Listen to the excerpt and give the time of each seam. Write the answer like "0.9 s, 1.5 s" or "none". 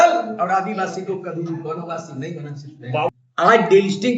2.8 s